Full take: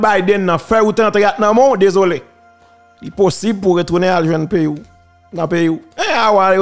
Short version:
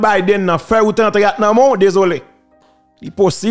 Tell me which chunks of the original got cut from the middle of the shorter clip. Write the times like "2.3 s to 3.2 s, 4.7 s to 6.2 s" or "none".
none